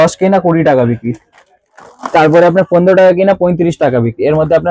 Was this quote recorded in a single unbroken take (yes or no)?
yes